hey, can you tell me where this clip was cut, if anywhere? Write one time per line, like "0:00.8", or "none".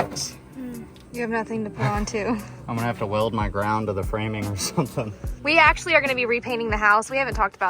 0:00.9
0:02.5
0:05.3